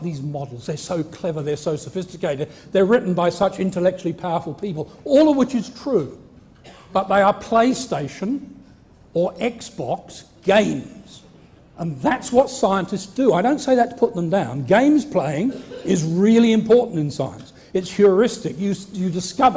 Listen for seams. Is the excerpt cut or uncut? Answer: uncut